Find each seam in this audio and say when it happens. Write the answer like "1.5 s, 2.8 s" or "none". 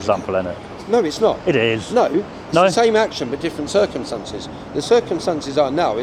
none